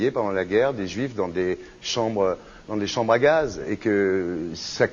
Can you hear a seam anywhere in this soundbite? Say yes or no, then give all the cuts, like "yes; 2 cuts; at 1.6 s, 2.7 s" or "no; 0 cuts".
no; 0 cuts